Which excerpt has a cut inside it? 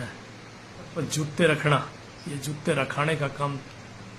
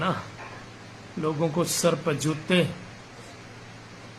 first; 1 cut; at 0.9 s

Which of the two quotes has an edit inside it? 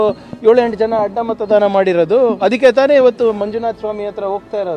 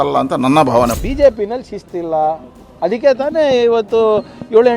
second; 1 cut; at 1.0 s

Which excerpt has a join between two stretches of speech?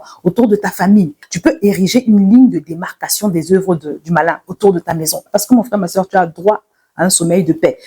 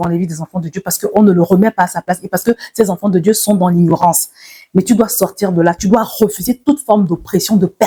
first; 2 cuts; at 1.2 s, 5.3 s

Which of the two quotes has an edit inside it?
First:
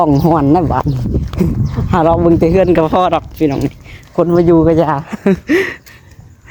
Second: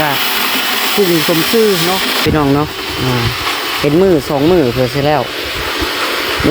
second; 1 cut; at 2.2 s

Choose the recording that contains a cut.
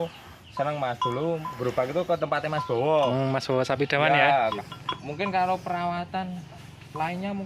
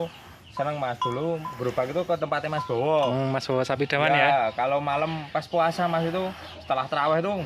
first; 1 cut; at 4.5 s

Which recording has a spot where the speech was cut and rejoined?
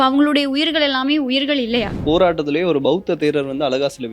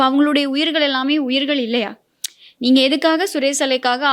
first; 1 cut; at 2.0 s

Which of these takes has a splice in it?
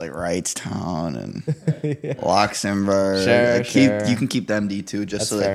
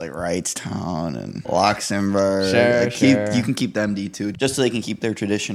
second; 2 cuts; at 1.4 s, 4.3 s

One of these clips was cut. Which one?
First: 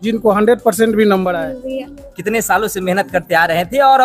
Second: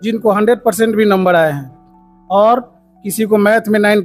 first; 1 cut; at 1.4 s

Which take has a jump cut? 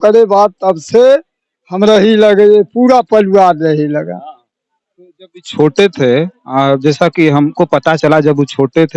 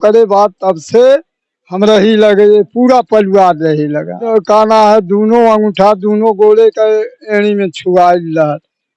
second; 1 cut; at 4.2 s

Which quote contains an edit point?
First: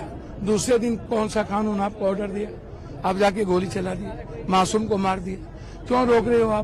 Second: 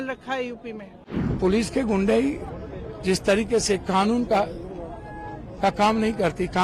second; 1 cut; at 1.2 s

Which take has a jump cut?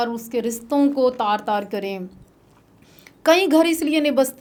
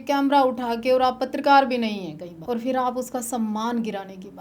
second; 1 cut; at 2.3 s

